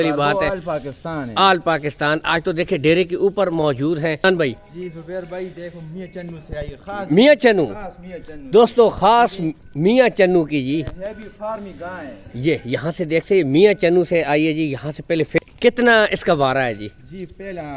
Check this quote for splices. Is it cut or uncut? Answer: cut